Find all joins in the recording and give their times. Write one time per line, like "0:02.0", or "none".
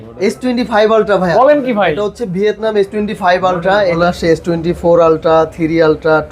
0:04.0